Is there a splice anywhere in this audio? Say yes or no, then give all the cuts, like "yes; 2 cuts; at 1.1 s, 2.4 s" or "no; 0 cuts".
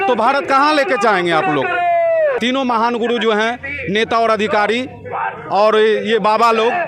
yes; 1 cut; at 2.4 s